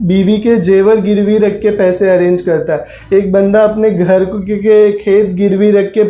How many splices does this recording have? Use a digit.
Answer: 0